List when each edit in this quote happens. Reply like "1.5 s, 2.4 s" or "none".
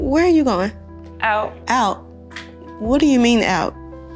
1.6 s